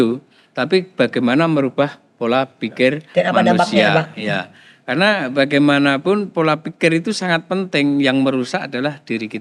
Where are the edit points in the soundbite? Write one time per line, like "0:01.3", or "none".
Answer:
none